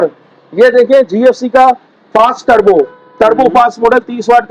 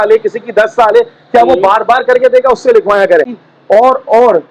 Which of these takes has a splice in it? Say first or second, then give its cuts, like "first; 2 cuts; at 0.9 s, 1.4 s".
second; 1 cut; at 3.4 s